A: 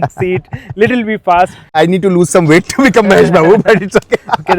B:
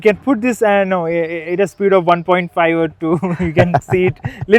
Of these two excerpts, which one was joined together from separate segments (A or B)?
A